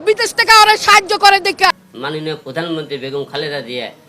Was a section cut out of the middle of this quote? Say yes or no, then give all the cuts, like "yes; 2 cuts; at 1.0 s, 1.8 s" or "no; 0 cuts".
yes; 1 cut; at 1.9 s